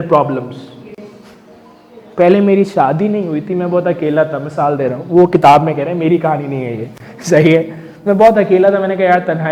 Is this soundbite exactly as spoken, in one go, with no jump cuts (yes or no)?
yes